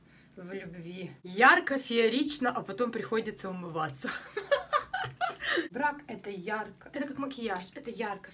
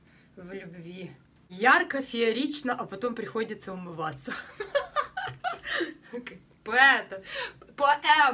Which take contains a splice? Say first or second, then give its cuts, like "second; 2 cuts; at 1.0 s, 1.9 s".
first; 2 cuts; at 1.2 s, 5.7 s